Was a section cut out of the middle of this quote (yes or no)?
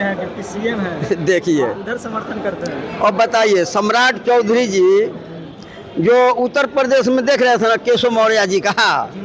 no